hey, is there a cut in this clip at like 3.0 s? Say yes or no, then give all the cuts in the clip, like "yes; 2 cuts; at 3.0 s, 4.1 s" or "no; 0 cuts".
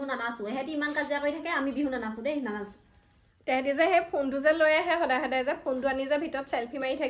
no; 0 cuts